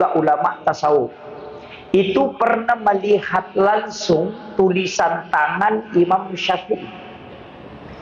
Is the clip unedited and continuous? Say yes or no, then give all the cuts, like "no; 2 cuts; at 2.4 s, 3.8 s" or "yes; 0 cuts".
yes; 0 cuts